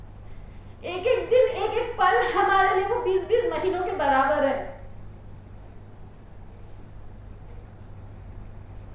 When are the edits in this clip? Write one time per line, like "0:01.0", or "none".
0:07.6